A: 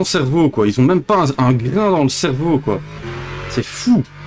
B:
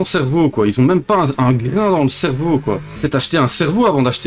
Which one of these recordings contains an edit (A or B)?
B